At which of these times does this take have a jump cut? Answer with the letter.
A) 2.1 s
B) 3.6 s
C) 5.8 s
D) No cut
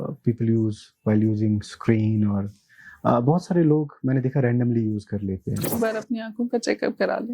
C